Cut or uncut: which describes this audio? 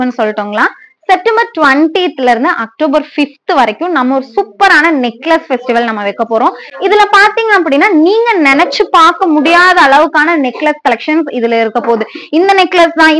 uncut